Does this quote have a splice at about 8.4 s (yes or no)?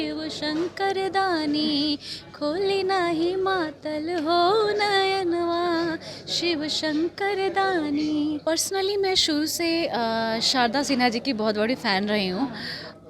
yes